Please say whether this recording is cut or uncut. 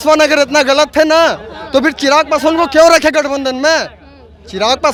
uncut